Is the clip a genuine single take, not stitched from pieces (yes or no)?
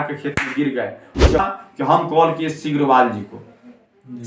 no